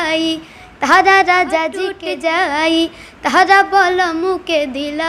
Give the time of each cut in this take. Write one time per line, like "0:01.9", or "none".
0:01.9